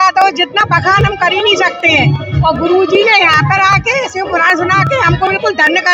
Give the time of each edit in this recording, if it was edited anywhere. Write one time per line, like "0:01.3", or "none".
none